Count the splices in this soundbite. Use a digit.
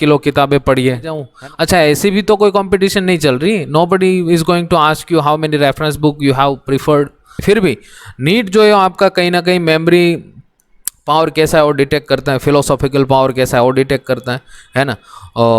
2